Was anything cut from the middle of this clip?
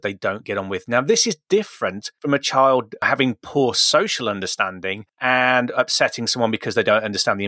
no; 0 cuts

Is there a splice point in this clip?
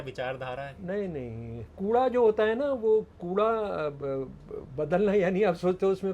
yes; 1 cut; at 1.7 s

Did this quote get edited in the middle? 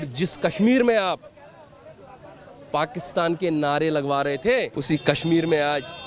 yes; 1 cut; at 4.8 s

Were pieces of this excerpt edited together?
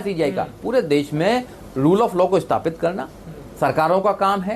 no; 0 cuts

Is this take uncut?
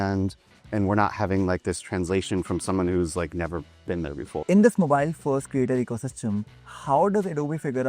no; 1 cut; at 4.4 s

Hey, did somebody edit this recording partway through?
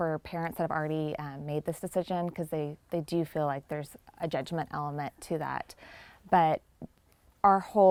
no; 0 cuts

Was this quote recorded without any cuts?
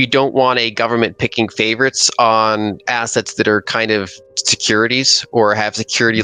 yes; 0 cuts

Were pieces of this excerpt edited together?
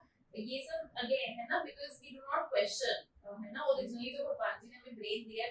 no; 0 cuts

